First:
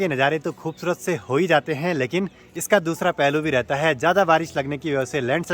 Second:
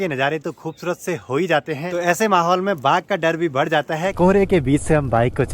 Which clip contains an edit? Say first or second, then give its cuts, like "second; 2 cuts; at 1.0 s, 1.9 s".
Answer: second; 2 cuts; at 1.9 s, 4.1 s